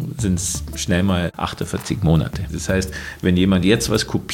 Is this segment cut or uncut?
cut